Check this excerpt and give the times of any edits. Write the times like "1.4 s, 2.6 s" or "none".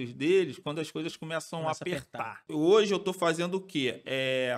2.4 s